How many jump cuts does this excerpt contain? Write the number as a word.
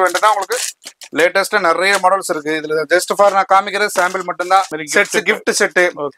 one